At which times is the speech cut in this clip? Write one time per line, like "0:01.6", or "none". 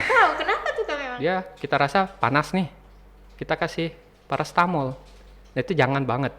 0:01.0